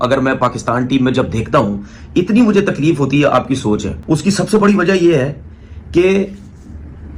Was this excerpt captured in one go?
no; 1 cut; at 3.9 s

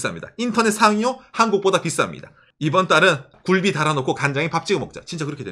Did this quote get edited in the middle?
yes; 2 cuts; at 2.4 s, 3.3 s

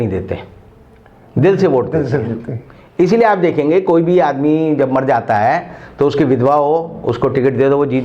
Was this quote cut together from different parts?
no; 0 cuts

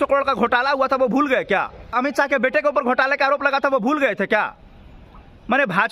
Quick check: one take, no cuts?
no; 1 cut; at 1.9 s

